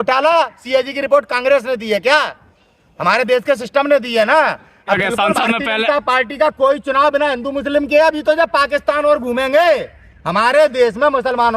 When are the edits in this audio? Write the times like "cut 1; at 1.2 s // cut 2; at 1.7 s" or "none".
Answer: cut 1; at 5.0 s